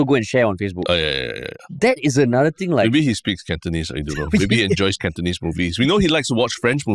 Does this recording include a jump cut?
no; 0 cuts

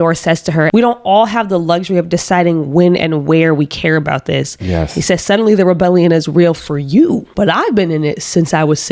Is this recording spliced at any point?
no; 0 cuts

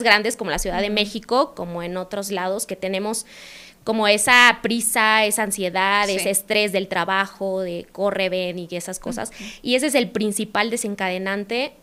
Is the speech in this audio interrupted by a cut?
no; 0 cuts

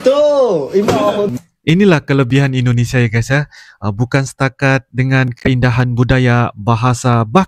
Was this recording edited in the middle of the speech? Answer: yes; 1 cut; at 1.3 s

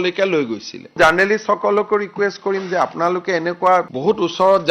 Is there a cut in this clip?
yes; 1 cut; at 1.0 s

